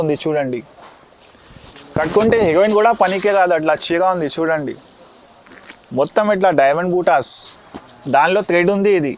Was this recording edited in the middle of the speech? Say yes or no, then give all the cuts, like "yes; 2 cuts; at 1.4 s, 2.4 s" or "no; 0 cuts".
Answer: yes; 1 cut; at 1.7 s